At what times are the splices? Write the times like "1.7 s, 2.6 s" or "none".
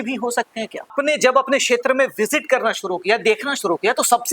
0.9 s